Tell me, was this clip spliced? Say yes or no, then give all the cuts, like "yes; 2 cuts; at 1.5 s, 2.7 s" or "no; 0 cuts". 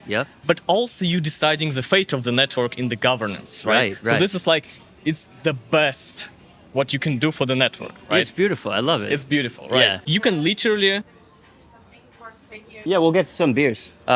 yes; 2 cuts; at 10.0 s, 11.0 s